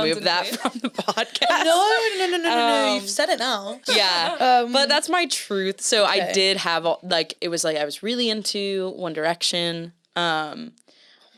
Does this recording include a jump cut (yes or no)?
no